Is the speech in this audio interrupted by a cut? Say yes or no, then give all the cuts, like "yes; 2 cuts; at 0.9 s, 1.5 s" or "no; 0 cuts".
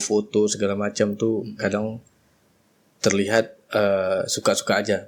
no; 0 cuts